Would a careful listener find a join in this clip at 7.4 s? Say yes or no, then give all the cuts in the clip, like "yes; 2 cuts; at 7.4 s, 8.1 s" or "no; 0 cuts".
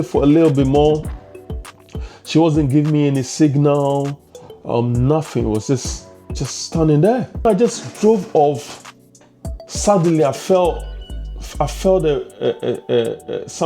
yes; 1 cut; at 7.4 s